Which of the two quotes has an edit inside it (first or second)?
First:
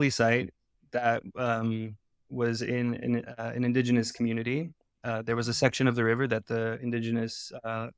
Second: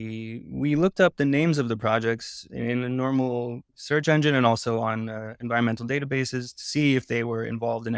second